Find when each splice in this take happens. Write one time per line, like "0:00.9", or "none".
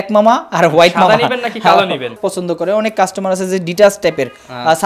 0:02.2